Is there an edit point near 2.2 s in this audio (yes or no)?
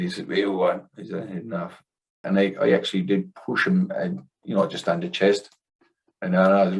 yes